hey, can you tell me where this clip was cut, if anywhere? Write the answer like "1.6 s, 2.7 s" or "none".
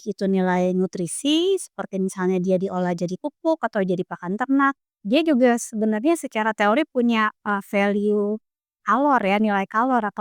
4.9 s